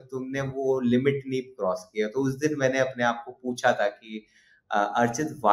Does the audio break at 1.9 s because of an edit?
no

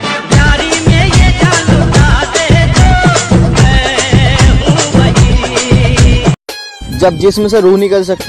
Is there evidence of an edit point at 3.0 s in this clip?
no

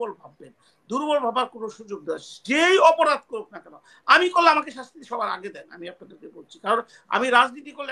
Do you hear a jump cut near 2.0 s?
no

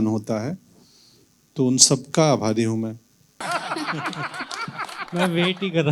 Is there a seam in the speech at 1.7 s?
no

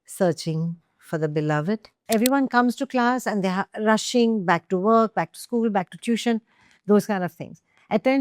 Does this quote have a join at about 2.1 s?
yes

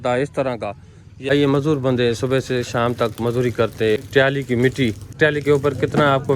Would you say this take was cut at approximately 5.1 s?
yes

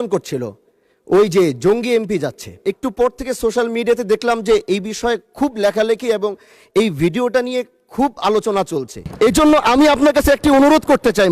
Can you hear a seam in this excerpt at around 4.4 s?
no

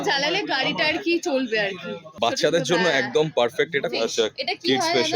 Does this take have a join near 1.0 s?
no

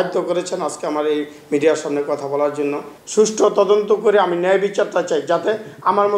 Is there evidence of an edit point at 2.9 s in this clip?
yes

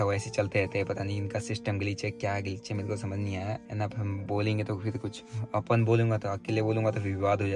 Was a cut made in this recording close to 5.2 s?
no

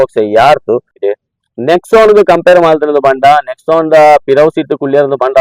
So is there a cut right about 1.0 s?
yes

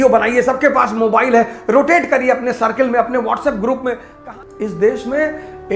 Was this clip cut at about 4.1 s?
yes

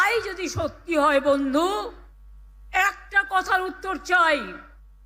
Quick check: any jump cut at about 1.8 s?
no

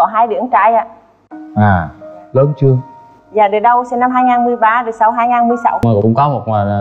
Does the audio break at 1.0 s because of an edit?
no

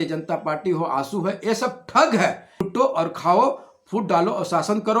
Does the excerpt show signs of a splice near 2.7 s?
yes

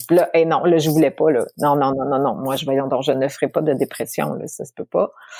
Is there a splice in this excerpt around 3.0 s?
no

